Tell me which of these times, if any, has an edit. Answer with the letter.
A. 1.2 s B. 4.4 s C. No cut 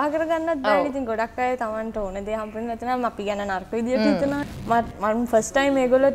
B